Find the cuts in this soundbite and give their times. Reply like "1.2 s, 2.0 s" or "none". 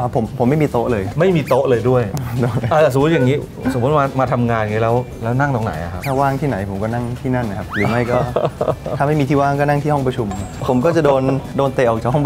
none